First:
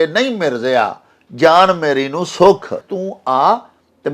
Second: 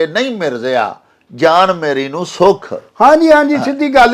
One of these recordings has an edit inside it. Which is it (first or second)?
first